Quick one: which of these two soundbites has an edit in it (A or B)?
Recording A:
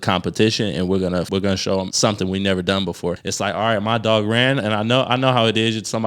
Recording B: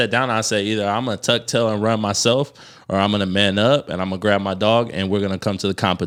A